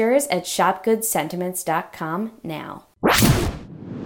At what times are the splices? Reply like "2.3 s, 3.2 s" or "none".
2.8 s

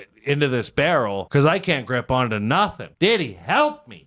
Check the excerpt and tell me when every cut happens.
1.2 s, 2.8 s

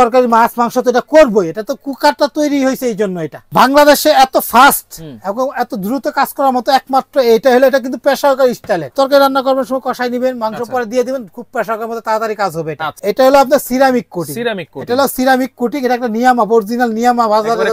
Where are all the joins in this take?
3.3 s, 8.9 s, 12.9 s

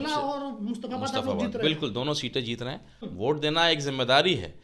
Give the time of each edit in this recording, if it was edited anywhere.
3.1 s

